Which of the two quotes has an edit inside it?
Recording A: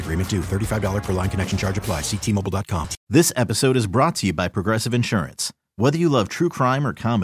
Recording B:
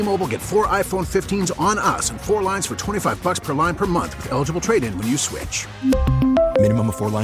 A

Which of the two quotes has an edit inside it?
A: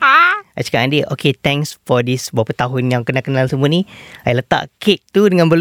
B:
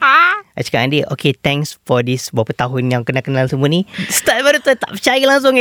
B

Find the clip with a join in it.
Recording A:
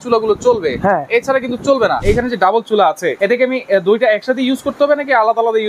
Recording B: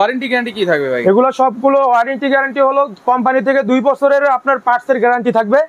A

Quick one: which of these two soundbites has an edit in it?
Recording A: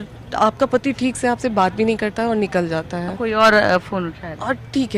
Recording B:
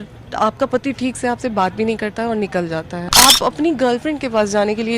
B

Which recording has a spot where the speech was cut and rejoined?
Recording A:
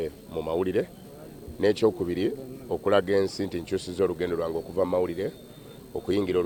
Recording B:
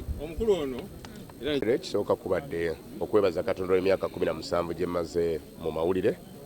B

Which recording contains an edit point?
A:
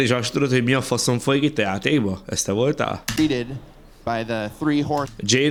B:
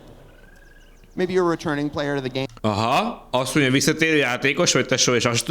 B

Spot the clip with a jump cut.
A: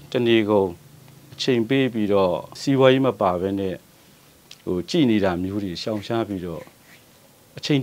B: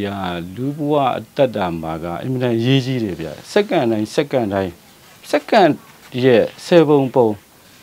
A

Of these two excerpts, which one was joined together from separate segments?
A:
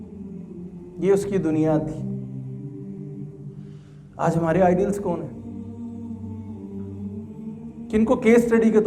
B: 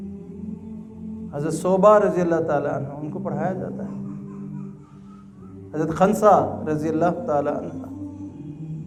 A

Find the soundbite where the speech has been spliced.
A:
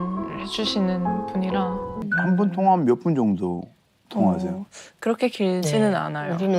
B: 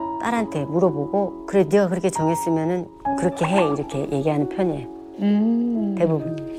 A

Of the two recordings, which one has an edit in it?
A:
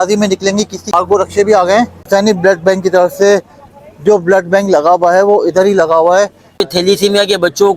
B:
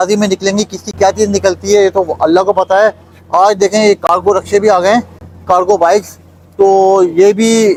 A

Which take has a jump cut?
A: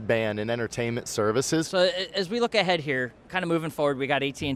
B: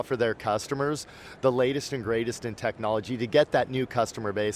A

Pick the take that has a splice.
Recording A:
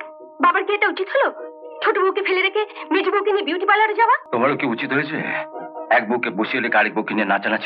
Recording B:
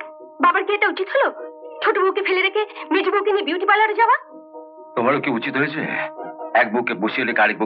A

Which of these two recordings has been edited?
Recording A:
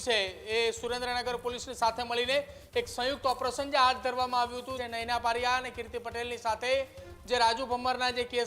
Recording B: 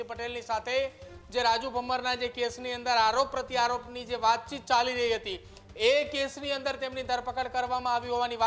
A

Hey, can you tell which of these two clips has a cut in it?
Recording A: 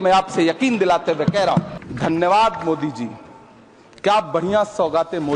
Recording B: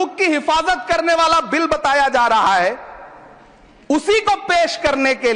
A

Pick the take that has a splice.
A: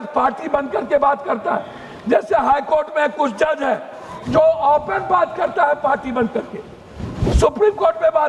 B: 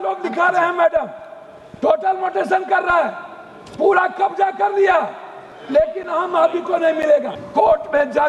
B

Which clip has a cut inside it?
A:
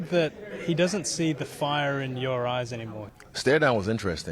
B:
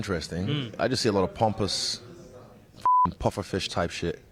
A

